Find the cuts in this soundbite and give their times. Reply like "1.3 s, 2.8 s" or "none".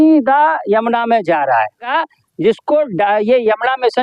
1.8 s